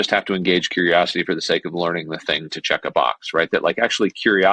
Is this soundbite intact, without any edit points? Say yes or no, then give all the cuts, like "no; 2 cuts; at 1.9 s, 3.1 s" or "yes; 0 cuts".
yes; 0 cuts